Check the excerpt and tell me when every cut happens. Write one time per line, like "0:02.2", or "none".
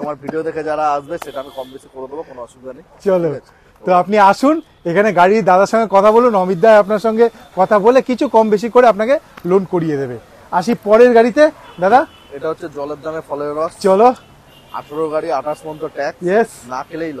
none